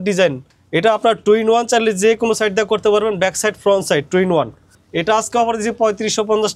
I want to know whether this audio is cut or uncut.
uncut